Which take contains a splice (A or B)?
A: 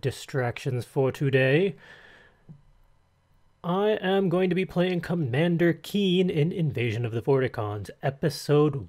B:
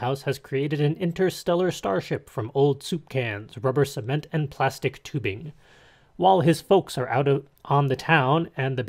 A